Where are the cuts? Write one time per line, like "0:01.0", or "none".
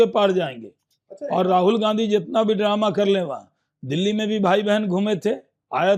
none